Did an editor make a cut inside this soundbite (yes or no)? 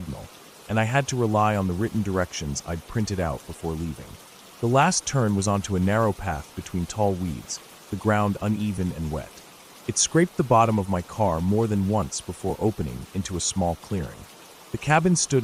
no